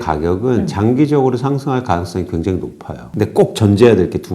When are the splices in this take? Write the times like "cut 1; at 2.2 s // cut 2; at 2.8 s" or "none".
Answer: cut 1; at 3.1 s